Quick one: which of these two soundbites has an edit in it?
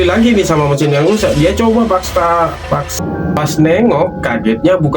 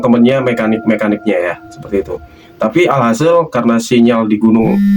first; 1 cut; at 3.0 s

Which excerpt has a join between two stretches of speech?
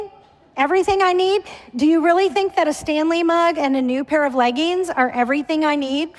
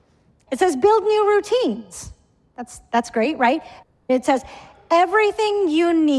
second; 1 cut; at 4.0 s

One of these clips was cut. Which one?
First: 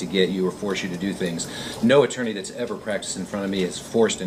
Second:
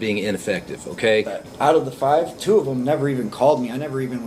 second; 1 cut; at 1.4 s

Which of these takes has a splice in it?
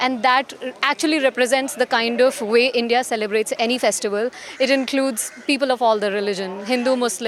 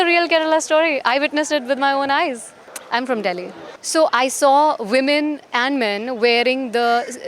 second; 1 cut; at 2.5 s

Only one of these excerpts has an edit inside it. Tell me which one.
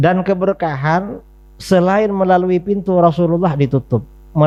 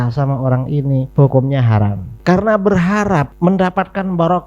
second; 3 cuts; at 1.1 s, 2.0 s, 3.3 s

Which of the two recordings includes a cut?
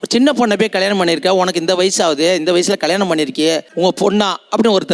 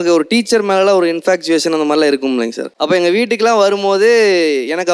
second; 1 cut; at 2.7 s

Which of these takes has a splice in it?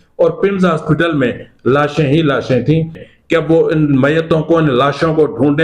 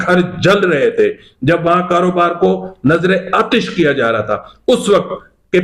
first; 1 cut; at 3.0 s

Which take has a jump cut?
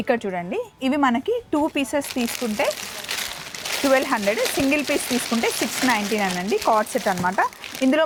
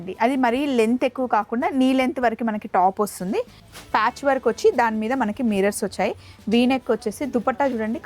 second; 1 cut; at 3.6 s

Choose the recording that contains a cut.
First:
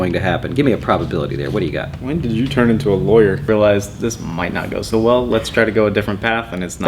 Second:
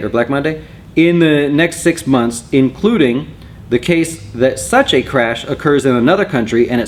first; 1 cut; at 3.4 s

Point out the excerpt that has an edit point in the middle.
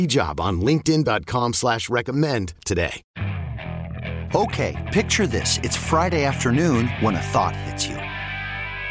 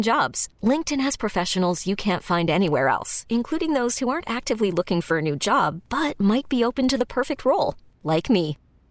first; 1 cut; at 3.1 s

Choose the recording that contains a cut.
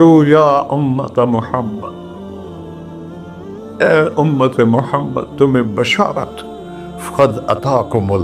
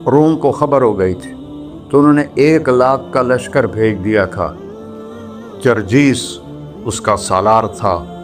first; 2 cuts; at 1.9 s, 3.8 s

